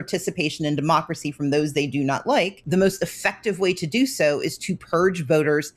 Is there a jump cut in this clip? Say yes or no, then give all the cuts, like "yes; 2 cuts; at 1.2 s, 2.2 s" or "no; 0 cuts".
yes; 1 cut; at 2.6 s